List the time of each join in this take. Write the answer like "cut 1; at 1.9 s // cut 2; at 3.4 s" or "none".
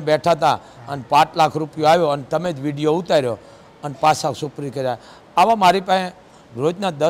none